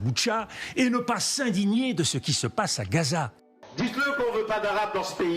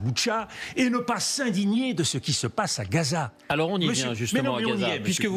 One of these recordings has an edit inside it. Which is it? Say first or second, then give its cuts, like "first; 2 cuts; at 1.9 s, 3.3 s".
first; 1 cut; at 3.4 s